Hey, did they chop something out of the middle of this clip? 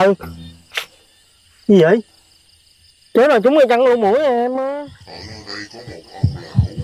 yes; 1 cut; at 4.7 s

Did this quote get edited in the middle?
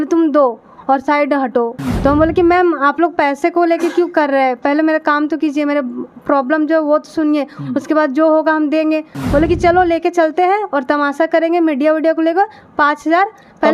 yes; 2 cuts; at 1.7 s, 9.1 s

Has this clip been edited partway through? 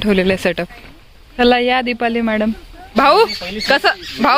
yes; 2 cuts; at 1.4 s, 3.0 s

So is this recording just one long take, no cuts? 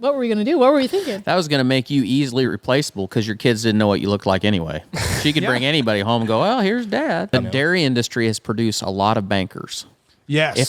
no; 1 cut; at 7.3 s

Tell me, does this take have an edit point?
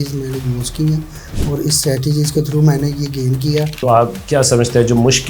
yes; 1 cut; at 3.8 s

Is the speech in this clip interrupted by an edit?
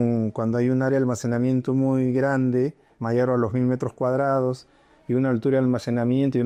no; 0 cuts

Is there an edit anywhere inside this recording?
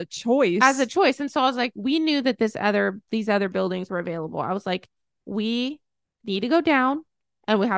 no; 0 cuts

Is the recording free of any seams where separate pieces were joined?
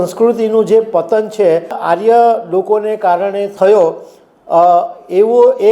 no; 2 cuts; at 1.8 s, 3.5 s

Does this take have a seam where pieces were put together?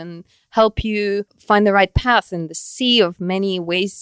yes; 1 cut; at 1.3 s

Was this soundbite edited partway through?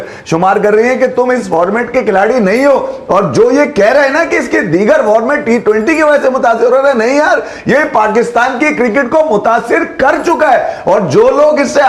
no; 0 cuts

